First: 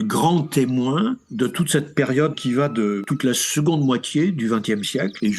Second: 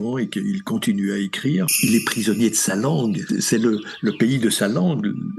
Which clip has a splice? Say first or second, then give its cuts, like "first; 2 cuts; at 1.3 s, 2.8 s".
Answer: second; 2 cuts; at 1.8 s, 3.2 s